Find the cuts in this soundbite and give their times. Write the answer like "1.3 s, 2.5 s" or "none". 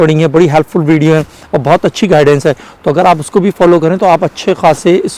none

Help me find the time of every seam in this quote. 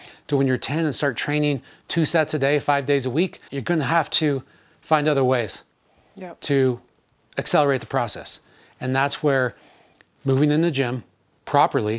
3.5 s

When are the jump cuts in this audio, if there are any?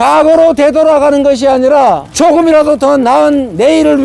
2.1 s

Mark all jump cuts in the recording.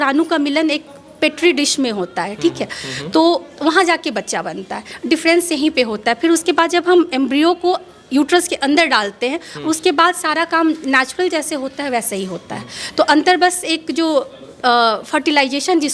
none

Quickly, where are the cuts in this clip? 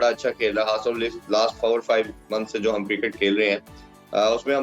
none

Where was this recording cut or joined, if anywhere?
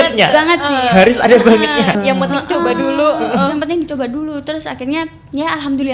2.0 s

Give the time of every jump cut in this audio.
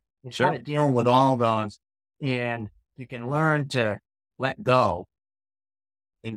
2.8 s

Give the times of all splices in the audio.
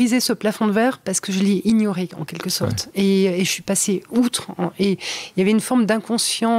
none

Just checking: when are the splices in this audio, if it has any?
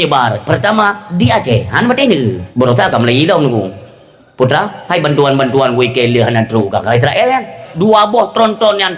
2.4 s, 7.6 s

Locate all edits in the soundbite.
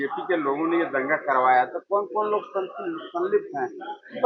none

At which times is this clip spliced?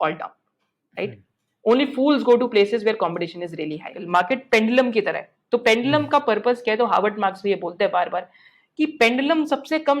4.0 s

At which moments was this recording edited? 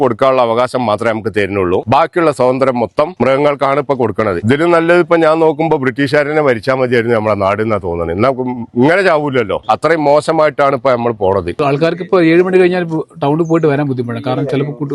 1.8 s, 3.1 s, 4.4 s, 9.6 s, 11.6 s

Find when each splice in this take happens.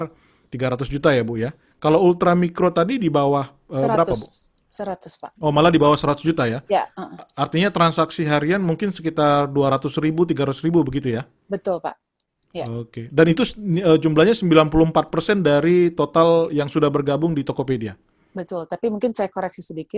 none

